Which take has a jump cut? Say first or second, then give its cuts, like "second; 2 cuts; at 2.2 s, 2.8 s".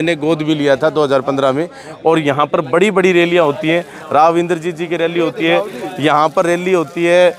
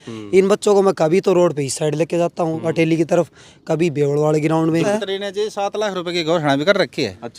second; 1 cut; at 4.9 s